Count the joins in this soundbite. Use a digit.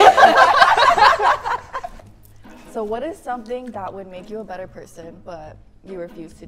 1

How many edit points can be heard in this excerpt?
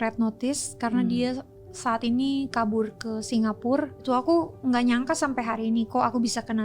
1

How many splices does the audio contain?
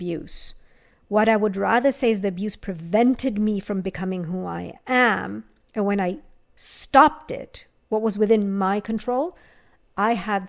0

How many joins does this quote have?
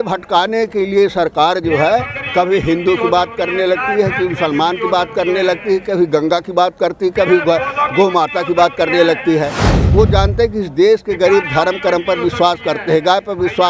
1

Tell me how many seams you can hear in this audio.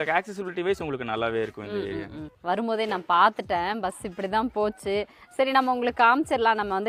0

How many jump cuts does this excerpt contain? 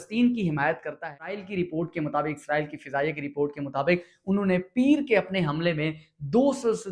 1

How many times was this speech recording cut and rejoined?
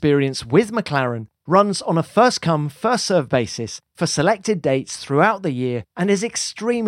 1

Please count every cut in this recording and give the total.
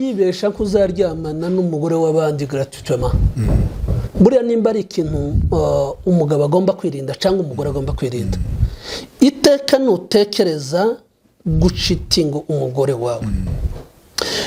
0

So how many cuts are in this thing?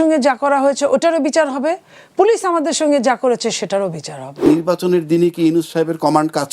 1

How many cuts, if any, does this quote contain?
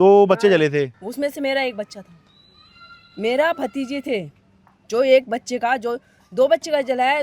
1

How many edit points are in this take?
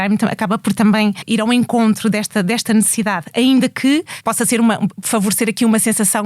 3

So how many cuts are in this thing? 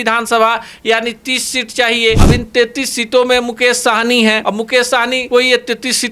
2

